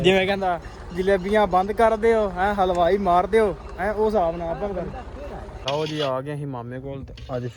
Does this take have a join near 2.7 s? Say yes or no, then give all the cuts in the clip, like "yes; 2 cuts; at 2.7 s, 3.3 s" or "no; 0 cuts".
no; 1 cut; at 5.6 s